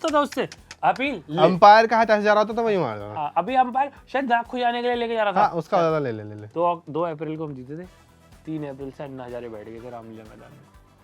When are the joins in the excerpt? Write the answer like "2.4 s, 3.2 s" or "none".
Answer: 6.4 s